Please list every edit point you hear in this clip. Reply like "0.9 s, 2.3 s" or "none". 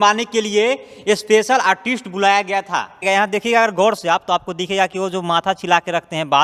3.0 s